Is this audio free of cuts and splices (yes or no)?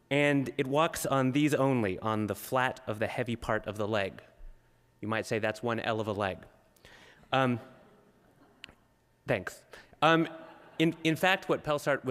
yes